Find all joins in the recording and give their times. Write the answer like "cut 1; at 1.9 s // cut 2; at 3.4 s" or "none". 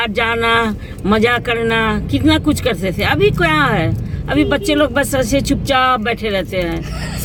none